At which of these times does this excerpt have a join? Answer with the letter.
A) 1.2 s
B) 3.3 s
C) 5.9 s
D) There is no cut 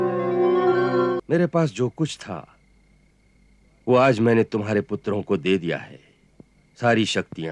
A